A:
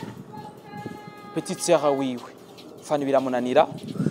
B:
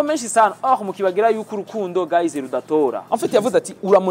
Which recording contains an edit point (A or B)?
B